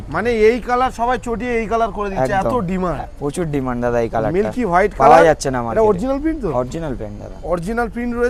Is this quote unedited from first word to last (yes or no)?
yes